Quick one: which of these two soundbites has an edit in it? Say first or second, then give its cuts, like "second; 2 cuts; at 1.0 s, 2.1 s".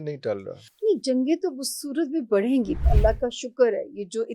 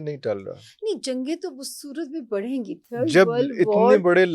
first; 1 cut; at 2.9 s